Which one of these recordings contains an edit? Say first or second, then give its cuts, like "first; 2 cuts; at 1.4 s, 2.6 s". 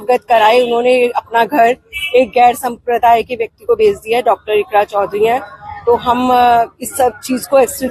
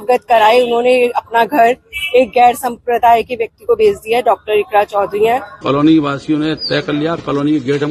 second; 1 cut; at 5.5 s